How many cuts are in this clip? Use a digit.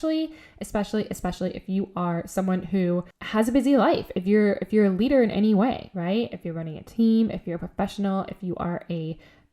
1